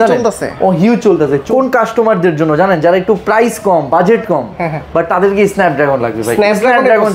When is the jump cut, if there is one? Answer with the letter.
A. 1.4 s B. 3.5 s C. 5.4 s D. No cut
A